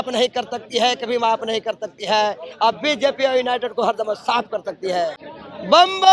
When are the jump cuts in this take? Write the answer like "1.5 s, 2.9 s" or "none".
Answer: none